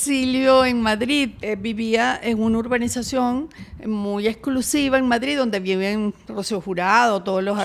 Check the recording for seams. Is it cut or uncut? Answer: cut